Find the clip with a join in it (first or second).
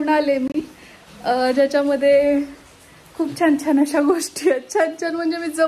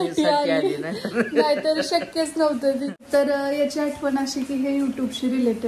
second